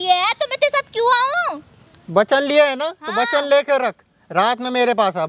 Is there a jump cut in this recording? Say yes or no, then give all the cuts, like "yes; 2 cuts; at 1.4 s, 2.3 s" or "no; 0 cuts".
no; 0 cuts